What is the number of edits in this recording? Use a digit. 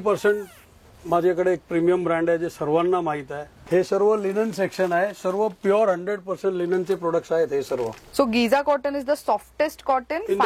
2